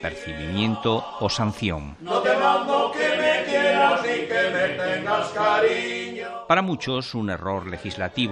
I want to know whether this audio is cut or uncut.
uncut